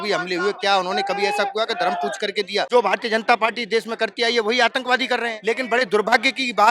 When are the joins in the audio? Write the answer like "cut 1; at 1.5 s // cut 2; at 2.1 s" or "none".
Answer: cut 1; at 2.7 s // cut 2; at 5.3 s

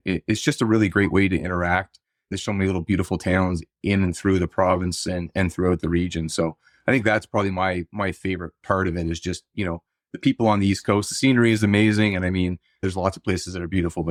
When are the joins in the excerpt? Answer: none

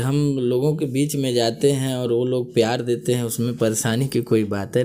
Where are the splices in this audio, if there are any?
none

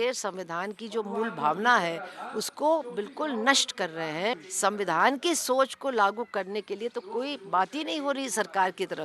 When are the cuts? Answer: cut 1; at 4.5 s

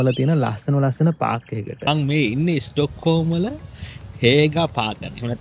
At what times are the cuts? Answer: cut 1; at 1.9 s

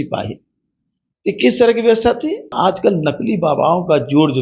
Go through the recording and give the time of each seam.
cut 1; at 2.5 s

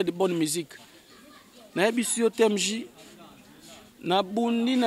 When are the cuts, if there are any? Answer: none

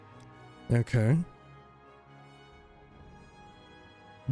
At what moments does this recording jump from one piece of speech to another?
none

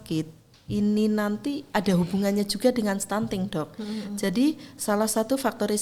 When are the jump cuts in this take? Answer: none

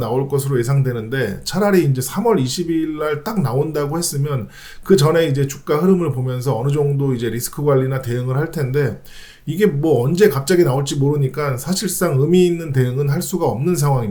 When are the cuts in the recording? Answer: none

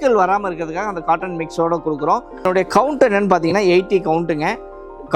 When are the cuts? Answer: cut 1; at 2.3 s

